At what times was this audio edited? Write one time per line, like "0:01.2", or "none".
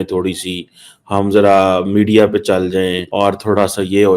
0:03.0